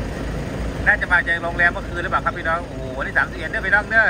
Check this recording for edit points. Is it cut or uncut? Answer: uncut